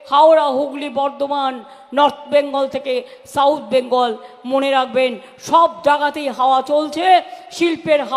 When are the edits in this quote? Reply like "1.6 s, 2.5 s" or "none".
none